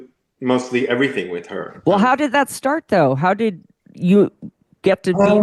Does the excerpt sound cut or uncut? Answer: uncut